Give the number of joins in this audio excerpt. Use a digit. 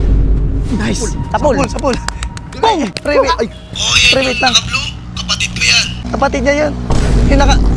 2